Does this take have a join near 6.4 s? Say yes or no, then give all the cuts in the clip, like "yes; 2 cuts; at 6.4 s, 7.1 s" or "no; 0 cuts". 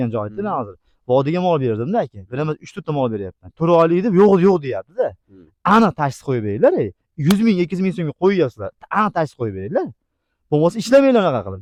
no; 0 cuts